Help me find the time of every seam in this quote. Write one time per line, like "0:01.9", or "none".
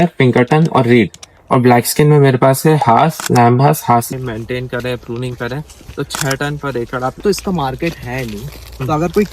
0:04.1
0:07.2